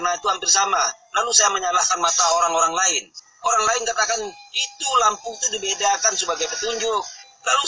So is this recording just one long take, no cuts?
yes; 0 cuts

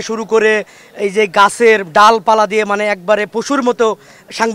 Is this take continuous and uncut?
yes; 0 cuts

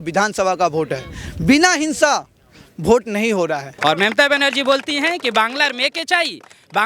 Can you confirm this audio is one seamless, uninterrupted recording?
no; 1 cut; at 3.7 s

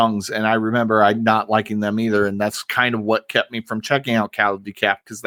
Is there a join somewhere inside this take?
no; 0 cuts

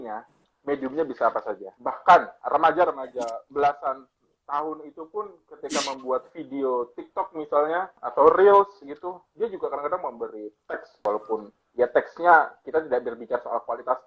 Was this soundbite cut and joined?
yes; 4 cuts; at 1.6 s, 2.4 s, 8.0 s, 11.1 s

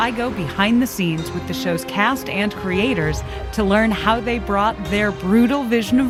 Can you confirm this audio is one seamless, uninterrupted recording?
yes; 0 cuts

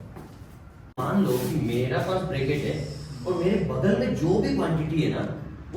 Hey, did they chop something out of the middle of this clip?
yes; 1 cut; at 1.0 s

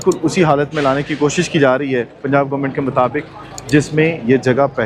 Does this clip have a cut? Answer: no; 0 cuts

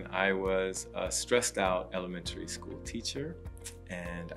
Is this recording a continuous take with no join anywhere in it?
yes; 0 cuts

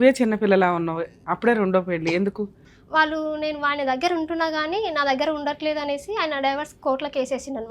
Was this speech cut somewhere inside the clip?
yes; 1 cut; at 2.6 s

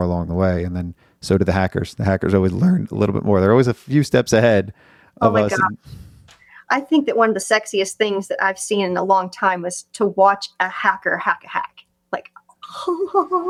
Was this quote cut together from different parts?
no; 0 cuts

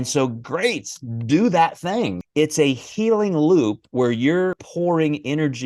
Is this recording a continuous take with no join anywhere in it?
no; 2 cuts; at 2.2 s, 4.6 s

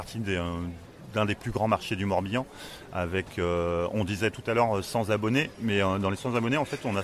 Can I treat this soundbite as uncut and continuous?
yes; 0 cuts

